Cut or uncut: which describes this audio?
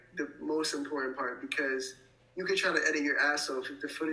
uncut